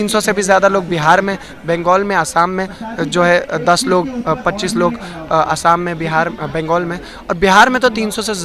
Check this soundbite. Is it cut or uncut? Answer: uncut